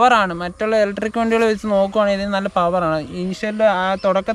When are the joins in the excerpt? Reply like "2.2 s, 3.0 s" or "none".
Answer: none